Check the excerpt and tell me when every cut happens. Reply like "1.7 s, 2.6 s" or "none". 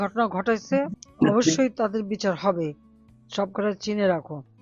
1.0 s